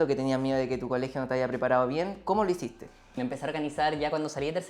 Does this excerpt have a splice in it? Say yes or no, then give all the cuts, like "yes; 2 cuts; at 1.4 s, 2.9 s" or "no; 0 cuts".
yes; 1 cut; at 3.2 s